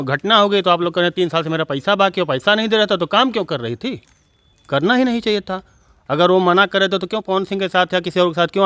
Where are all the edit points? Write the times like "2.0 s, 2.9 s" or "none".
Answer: none

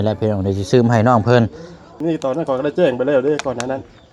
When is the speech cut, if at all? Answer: 1.9 s

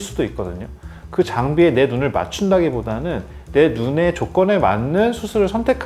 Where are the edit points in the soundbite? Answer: 1.0 s

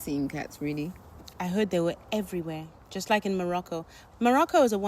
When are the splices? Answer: 1.3 s, 4.0 s

